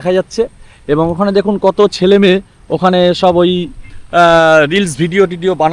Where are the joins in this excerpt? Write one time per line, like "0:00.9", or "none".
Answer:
none